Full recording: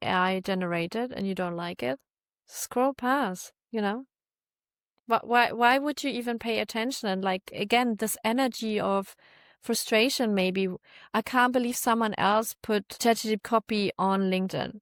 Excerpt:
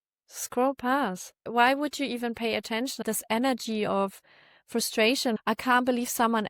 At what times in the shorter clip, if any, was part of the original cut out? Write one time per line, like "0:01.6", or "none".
0:01.5
0:03.0
0:05.4

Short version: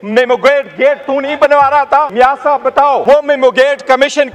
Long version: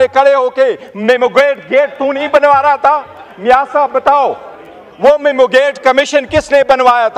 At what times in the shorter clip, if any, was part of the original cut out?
0:02.1
0:03.0

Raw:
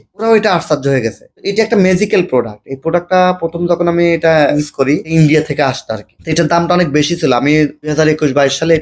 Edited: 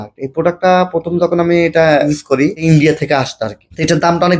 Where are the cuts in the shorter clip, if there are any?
none

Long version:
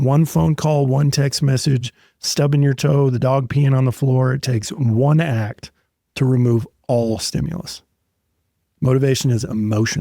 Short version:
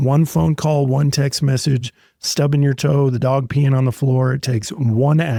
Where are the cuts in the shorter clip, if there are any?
none

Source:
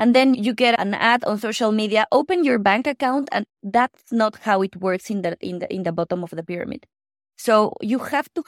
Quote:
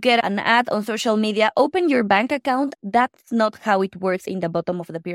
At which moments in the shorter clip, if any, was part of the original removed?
0:02.7
0:04.2

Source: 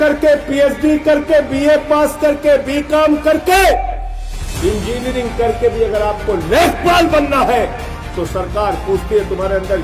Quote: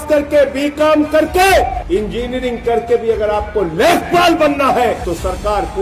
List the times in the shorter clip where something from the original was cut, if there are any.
0:01.8
0:05.0

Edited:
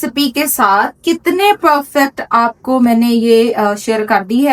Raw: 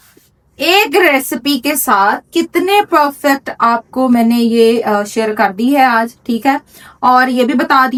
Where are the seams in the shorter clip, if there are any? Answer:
none

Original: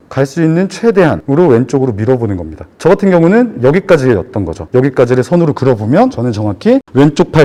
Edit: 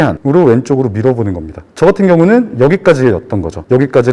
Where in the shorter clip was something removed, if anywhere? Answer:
none

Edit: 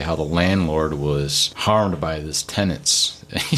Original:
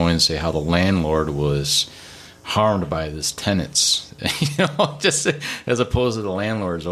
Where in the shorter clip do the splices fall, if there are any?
0:01.4

